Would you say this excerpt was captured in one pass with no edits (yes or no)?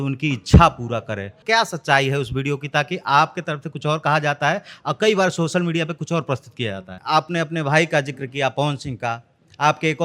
no